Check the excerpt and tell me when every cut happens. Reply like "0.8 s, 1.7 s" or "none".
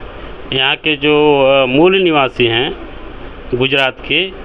none